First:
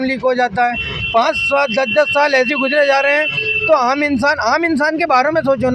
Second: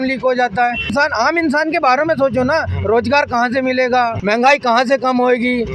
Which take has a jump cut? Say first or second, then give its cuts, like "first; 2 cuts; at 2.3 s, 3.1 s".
second; 2 cuts; at 0.9 s, 4.2 s